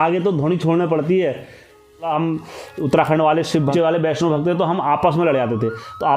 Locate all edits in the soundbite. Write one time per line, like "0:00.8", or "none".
0:02.1
0:03.7